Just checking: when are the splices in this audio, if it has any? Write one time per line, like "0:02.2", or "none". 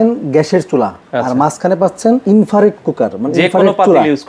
0:01.0
0:02.2